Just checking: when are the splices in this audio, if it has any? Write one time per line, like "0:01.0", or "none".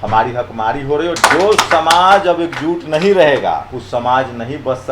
0:01.1
0:03.8